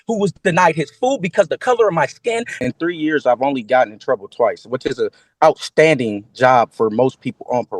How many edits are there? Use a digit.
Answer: 1